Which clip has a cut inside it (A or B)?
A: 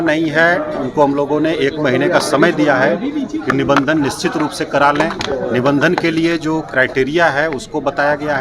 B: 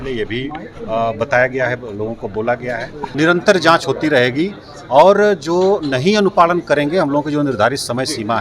B